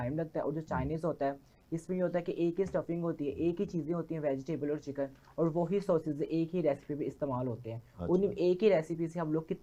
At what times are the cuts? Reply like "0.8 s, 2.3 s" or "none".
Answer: none